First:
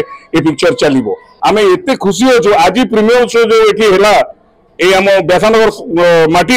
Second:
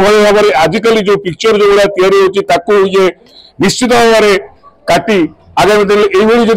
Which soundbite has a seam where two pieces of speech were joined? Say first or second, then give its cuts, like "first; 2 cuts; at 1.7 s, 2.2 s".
first; 1 cut; at 1.3 s